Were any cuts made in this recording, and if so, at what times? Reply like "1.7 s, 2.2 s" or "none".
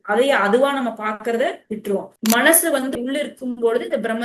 2.1 s